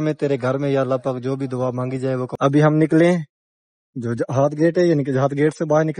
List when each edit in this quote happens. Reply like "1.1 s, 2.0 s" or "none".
1.9 s